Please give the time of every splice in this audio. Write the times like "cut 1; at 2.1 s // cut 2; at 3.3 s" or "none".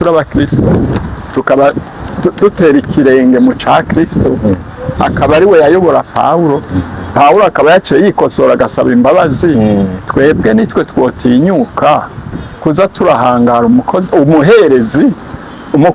cut 1; at 0.9 s